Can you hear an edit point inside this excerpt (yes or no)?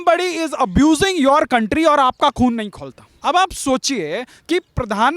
yes